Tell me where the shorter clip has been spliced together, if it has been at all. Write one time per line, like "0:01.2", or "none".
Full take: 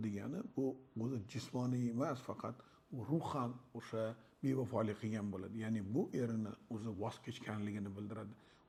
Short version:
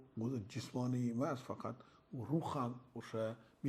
none

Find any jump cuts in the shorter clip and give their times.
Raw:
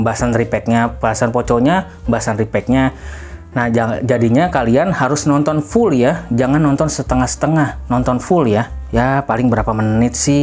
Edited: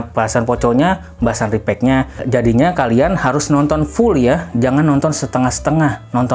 0:02.2

